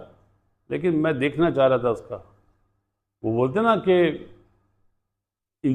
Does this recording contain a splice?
no; 0 cuts

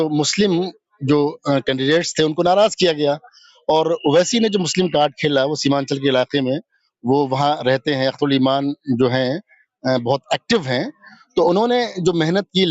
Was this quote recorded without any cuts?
yes; 0 cuts

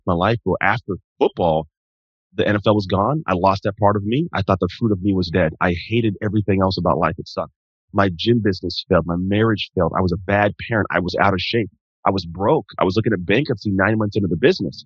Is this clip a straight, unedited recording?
no; 2 cuts; at 1.0 s, 5.3 s

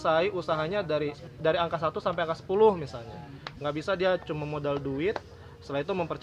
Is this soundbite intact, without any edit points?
no; 1 cut; at 1.2 s

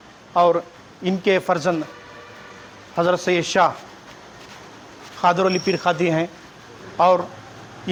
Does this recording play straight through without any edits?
yes; 0 cuts

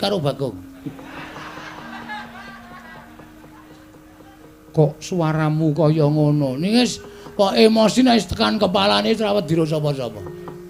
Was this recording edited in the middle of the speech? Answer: no; 0 cuts

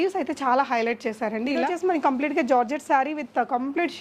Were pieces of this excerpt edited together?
yes; 1 cut; at 1.7 s

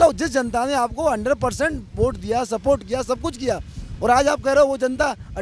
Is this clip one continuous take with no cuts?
yes; 0 cuts

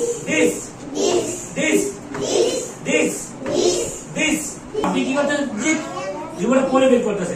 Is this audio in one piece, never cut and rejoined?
no; 1 cut; at 4.8 s

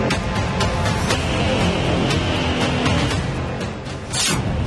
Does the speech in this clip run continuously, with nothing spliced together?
no; 1 cut; at 0.9 s

